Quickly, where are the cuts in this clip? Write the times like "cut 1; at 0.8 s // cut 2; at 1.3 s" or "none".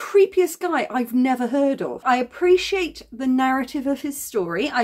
cut 1; at 2.0 s